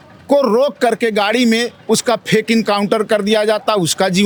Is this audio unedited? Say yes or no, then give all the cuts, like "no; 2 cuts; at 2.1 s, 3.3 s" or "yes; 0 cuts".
yes; 0 cuts